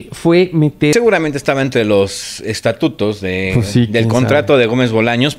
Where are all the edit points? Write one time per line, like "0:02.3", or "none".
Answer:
0:00.9